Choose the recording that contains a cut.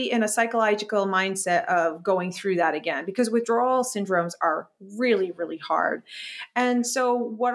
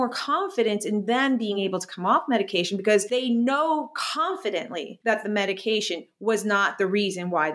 second; 2 cuts; at 1.6 s, 3.1 s

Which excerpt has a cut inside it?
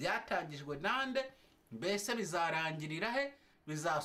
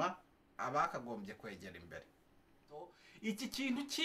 second; 1 cut; at 3.0 s

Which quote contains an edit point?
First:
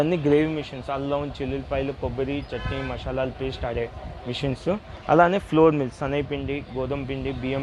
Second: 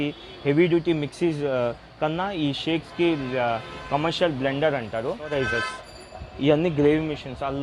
second; 1 cut; at 5.3 s

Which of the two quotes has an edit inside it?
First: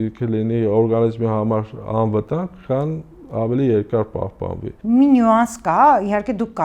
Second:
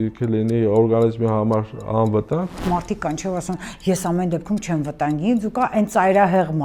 second; 1 cut; at 2.5 s

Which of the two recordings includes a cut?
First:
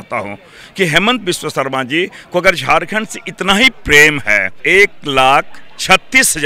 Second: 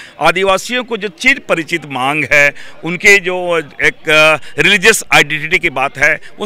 first; 1 cut; at 4.5 s

